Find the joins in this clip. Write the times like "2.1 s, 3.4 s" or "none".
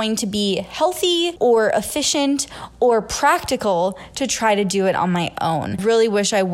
1.3 s, 5.8 s